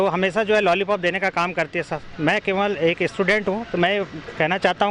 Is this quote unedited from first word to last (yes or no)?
yes